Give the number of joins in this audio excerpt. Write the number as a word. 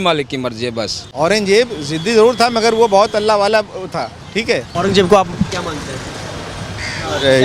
two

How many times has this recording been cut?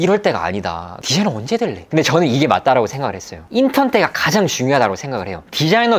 three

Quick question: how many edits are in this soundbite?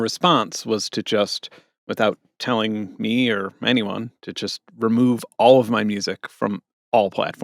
zero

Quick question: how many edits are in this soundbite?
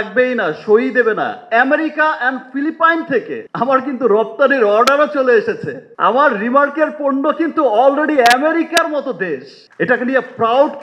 two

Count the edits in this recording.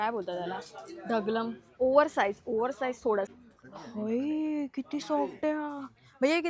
one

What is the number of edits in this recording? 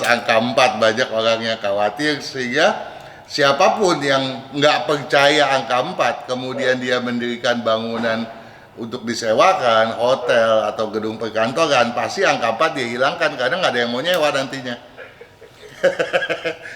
zero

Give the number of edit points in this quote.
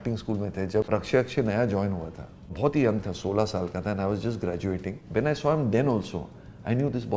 three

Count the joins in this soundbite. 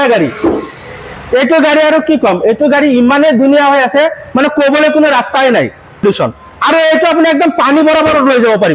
one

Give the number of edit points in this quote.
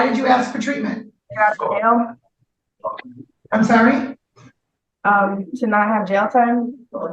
one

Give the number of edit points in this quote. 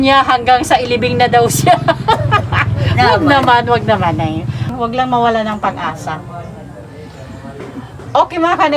one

